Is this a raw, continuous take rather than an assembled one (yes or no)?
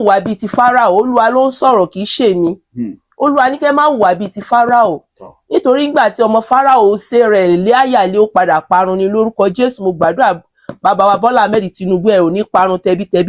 yes